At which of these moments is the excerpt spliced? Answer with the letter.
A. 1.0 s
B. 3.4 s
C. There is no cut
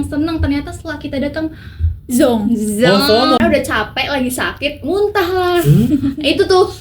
B